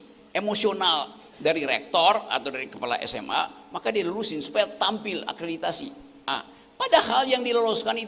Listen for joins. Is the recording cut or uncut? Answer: uncut